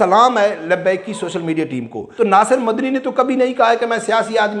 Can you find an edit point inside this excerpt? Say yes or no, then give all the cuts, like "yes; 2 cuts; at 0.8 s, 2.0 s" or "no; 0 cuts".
yes; 1 cut; at 2.0 s